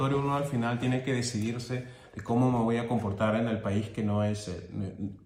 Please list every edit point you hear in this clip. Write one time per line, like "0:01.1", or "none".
none